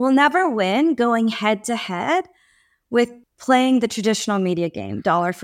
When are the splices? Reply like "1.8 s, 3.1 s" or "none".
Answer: 3.3 s